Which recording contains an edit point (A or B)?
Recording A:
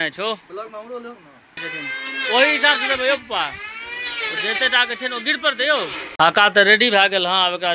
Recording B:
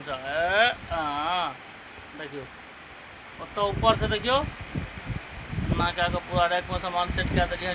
A